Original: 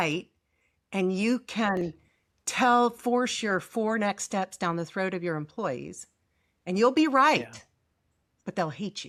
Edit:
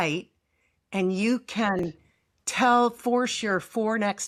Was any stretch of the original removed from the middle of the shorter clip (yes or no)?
no